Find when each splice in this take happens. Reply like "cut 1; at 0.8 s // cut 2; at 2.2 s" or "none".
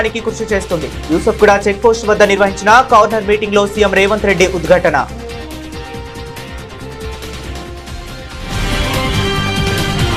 none